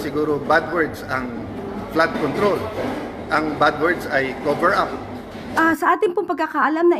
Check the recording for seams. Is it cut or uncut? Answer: cut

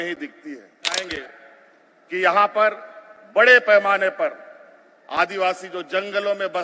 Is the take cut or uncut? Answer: cut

